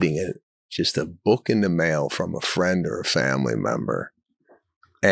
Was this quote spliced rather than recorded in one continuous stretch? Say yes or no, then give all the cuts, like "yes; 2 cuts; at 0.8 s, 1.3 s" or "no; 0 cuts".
no; 0 cuts